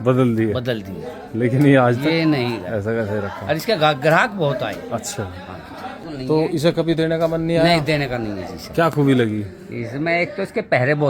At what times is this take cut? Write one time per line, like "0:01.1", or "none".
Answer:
0:06.0